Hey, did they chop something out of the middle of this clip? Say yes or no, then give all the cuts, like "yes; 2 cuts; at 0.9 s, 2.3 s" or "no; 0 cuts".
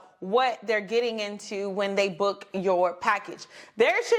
no; 0 cuts